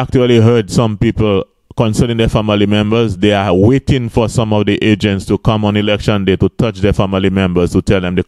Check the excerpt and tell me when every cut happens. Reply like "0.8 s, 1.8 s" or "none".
none